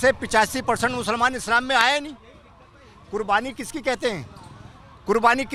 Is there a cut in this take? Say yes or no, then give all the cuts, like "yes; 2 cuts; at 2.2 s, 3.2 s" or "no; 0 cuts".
no; 0 cuts